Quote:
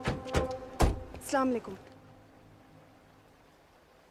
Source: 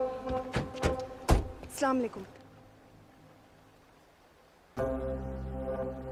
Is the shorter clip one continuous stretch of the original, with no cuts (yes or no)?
yes